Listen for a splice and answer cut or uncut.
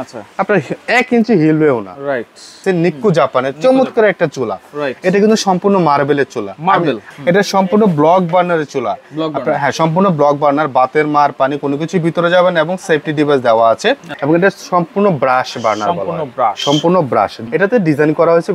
cut